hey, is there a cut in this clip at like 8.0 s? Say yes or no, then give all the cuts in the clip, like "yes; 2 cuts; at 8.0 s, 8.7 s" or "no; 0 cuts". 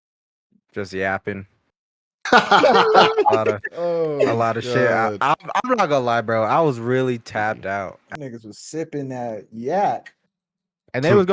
yes; 1 cut; at 8.0 s